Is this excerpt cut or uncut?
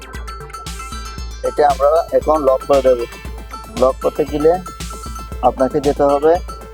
cut